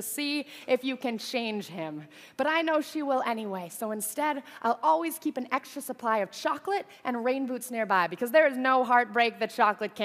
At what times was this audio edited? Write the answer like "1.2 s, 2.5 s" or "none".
none